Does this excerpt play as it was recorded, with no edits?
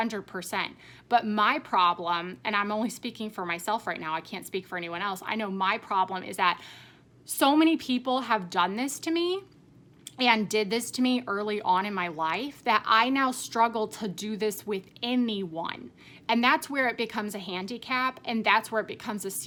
yes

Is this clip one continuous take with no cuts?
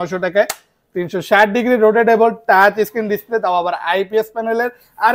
yes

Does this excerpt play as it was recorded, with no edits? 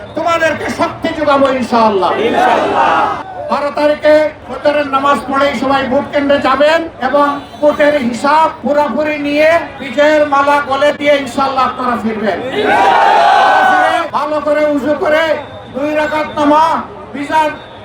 no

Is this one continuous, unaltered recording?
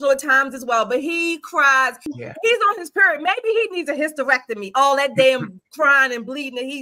no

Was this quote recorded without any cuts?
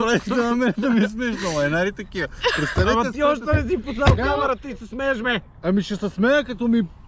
yes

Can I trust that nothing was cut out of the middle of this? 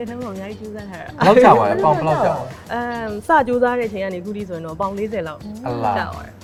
yes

